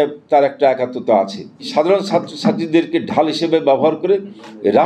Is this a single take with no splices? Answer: no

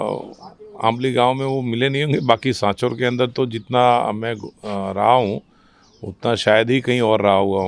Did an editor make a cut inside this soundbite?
no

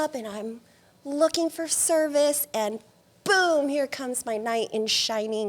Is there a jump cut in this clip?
no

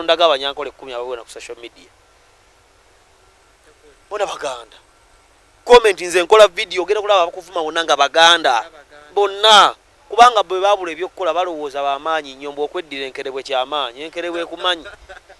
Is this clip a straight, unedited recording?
yes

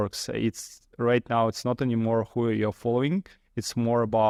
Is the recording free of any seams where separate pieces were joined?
yes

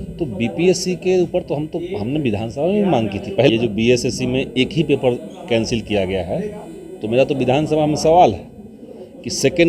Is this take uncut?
no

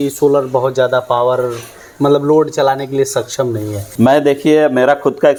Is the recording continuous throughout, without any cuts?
yes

